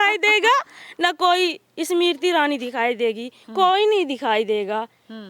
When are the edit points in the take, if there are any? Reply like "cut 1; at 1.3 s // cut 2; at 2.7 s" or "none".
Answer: none